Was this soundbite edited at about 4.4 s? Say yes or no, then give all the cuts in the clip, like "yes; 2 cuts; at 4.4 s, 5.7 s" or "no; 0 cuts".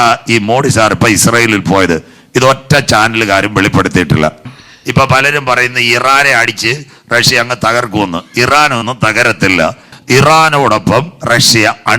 yes; 2 cuts; at 4.4 s, 9.9 s